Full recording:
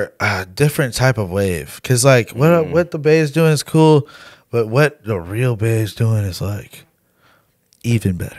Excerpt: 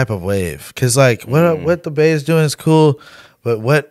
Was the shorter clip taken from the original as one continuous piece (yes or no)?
yes